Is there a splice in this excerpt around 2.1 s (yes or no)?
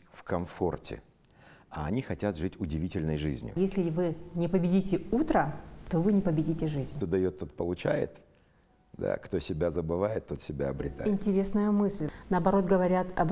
no